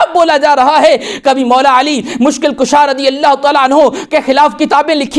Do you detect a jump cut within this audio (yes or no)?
no